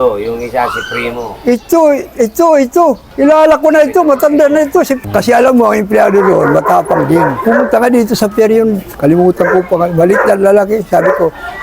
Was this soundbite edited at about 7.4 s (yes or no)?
yes